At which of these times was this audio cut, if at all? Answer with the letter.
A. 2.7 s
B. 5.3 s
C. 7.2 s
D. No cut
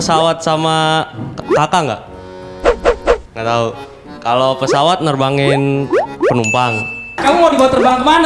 C